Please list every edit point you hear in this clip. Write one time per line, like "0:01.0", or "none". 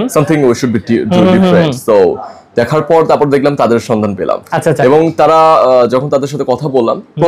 none